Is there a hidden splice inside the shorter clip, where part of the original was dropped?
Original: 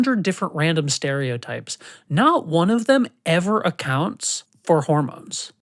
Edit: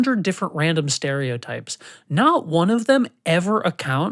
no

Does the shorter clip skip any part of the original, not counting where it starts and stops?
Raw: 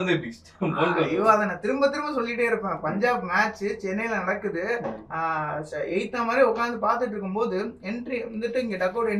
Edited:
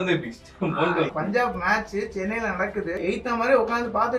yes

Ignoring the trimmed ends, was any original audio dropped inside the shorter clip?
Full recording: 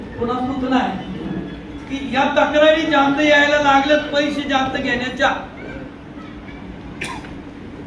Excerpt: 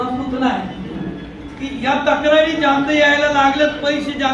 no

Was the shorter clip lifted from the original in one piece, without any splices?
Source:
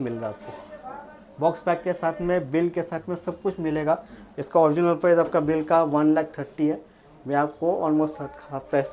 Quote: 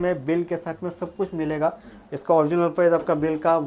yes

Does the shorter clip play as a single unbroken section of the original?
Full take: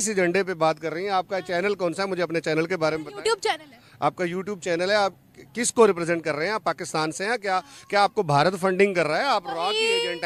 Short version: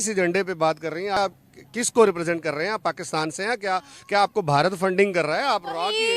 no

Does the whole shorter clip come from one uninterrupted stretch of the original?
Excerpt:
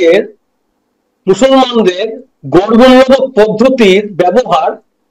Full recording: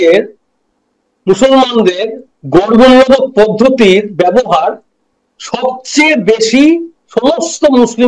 yes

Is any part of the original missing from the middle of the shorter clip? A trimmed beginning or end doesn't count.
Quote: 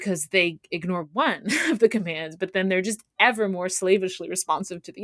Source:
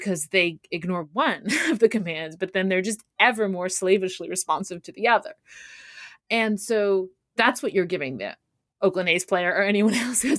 no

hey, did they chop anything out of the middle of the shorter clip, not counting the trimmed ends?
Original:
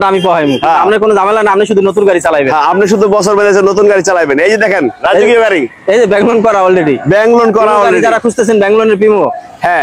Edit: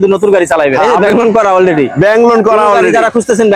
yes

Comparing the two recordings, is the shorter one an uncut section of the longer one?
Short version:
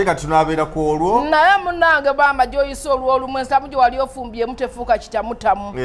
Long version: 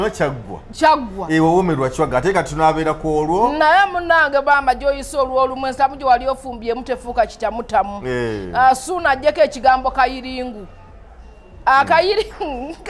yes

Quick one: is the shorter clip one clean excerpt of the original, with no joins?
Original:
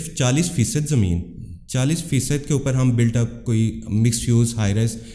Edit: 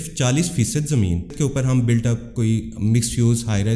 no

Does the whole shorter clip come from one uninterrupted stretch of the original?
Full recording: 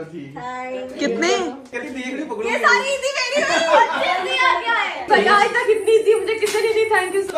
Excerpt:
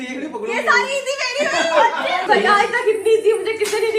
no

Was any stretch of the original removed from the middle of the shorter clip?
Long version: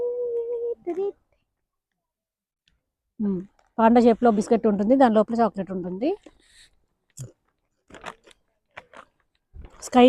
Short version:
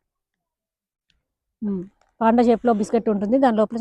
no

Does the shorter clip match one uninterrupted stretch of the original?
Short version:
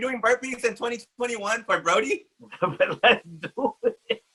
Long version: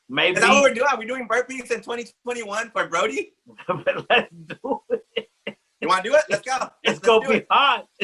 yes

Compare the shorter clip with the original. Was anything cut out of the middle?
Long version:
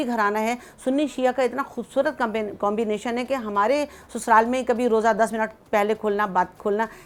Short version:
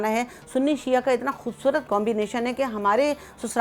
yes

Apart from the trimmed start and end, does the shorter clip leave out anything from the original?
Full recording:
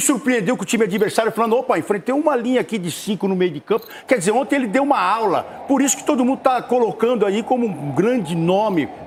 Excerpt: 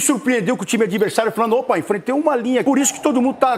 yes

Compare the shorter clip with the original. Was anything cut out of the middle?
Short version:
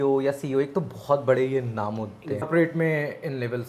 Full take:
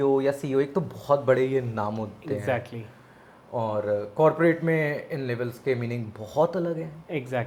yes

